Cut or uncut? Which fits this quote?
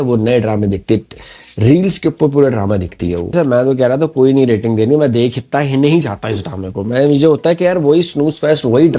cut